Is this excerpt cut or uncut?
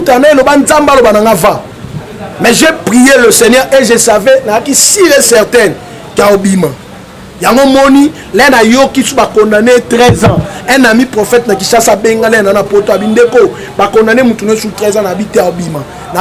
uncut